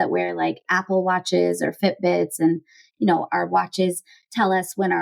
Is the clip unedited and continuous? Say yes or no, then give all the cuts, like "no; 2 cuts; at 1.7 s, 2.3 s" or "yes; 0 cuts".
yes; 0 cuts